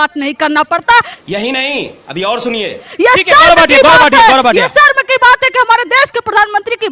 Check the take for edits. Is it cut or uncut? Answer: uncut